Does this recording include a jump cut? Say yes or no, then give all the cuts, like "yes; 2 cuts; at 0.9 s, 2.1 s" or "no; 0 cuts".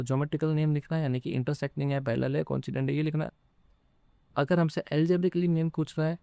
no; 0 cuts